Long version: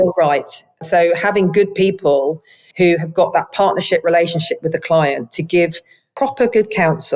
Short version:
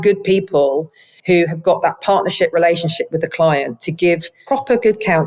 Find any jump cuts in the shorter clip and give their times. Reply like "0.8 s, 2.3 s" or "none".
4.3 s